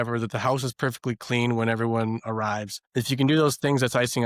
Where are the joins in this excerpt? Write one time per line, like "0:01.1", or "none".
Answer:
none